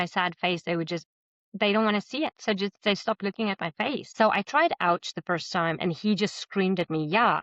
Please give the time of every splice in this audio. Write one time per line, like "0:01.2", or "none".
0:04.1